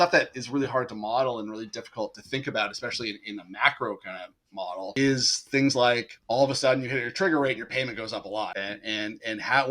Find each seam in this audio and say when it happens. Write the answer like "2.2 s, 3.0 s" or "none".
4.9 s, 6.1 s, 8.5 s